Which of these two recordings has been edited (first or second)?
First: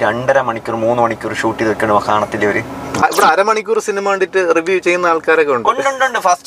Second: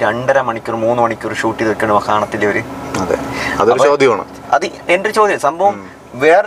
first